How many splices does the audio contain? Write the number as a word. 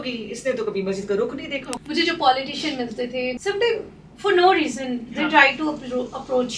two